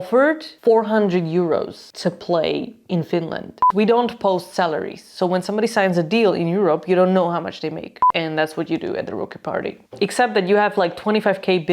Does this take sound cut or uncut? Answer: cut